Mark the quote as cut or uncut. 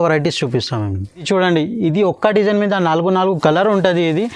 uncut